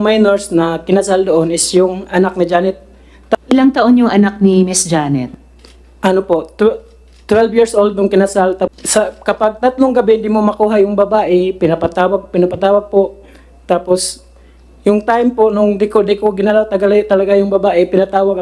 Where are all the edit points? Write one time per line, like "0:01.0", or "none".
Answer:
0:03.4
0:08.7

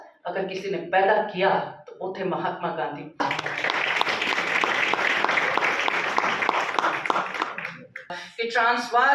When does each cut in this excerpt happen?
0:03.2
0:08.2

